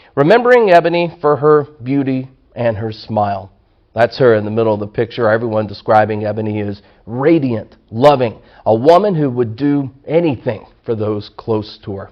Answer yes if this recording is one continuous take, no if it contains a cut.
no